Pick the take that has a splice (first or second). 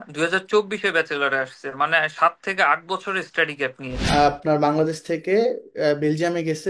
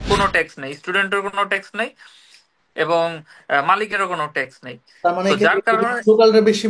first